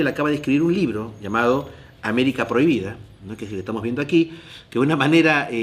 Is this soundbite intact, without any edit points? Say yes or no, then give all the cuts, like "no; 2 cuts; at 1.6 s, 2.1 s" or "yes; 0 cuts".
no; 1 cut; at 3.6 s